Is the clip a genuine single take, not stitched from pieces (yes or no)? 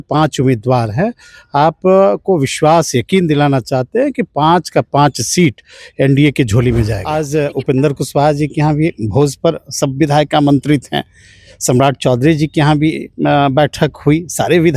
no